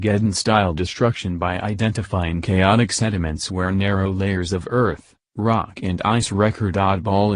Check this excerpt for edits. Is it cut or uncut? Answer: cut